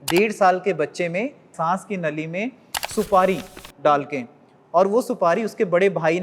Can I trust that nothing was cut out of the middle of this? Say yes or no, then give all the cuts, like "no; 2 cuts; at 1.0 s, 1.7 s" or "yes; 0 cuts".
no; 1 cut; at 1.5 s